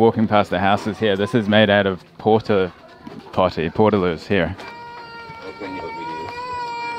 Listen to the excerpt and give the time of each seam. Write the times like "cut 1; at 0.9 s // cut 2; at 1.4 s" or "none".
none